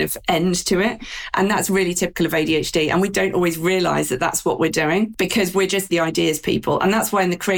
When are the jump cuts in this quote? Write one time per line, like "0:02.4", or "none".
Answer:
0:03.1
0:05.7